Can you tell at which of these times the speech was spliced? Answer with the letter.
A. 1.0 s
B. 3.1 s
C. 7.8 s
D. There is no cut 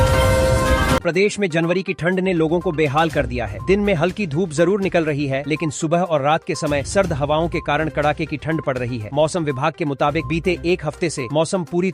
A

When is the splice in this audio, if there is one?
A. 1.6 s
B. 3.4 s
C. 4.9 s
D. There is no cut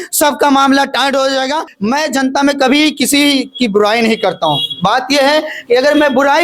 A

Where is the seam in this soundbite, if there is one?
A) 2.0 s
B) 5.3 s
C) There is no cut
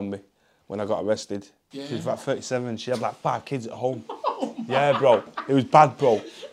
A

